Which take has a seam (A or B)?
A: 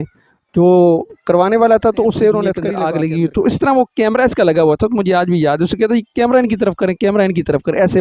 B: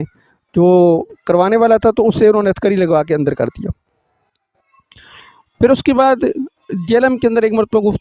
A